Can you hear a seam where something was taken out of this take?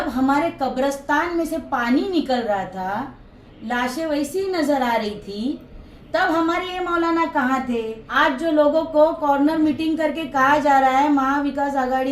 yes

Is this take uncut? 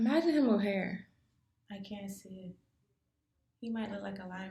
yes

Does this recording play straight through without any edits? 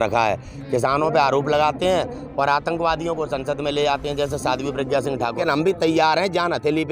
no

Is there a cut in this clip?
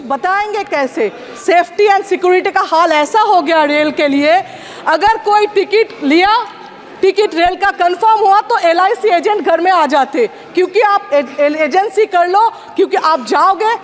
yes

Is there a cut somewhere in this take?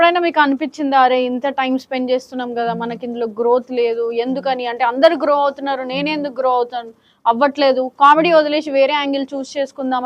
no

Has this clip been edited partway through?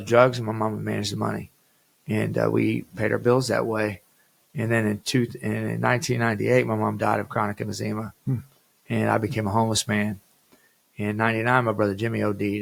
no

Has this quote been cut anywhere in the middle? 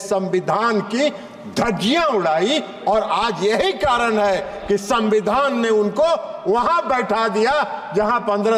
no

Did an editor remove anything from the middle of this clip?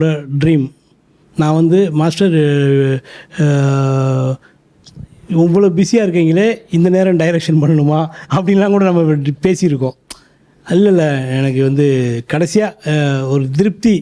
no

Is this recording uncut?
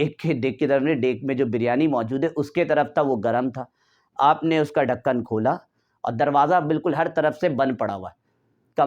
yes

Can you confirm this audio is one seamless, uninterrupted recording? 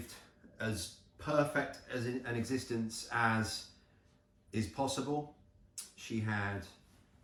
yes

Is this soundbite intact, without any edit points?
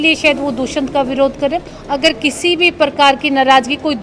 no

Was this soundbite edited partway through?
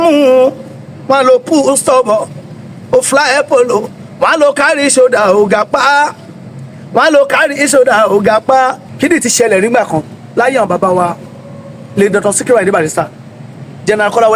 yes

